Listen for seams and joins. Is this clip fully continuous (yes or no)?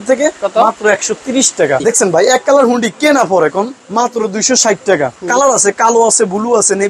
no